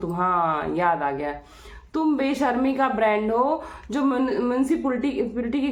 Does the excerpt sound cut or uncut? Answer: uncut